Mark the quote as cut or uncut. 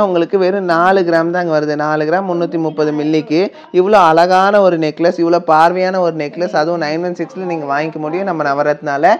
uncut